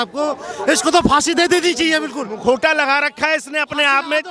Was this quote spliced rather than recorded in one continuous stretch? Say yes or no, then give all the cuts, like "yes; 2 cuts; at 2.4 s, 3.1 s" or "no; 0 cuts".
no; 0 cuts